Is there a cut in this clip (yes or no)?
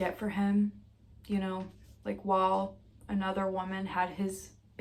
no